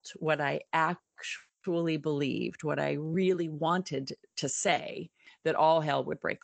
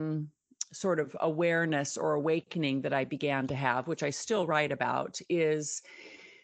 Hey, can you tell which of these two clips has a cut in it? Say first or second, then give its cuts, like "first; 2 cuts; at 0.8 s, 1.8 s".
first; 1 cut; at 5.2 s